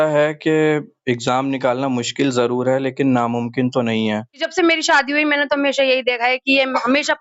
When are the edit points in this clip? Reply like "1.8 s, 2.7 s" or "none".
4.4 s